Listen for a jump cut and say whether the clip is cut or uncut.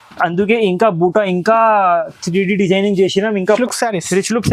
cut